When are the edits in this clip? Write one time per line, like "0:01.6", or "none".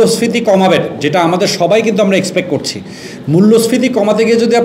none